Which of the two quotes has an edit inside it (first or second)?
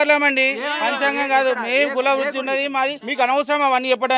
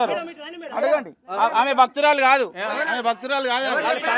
first